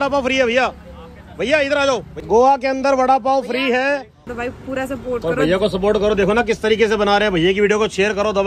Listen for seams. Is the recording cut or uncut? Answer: cut